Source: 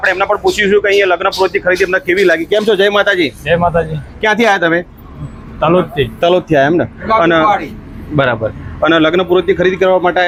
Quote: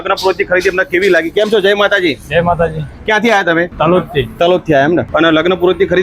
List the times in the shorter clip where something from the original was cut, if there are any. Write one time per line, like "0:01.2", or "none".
0:03.7
0:05.1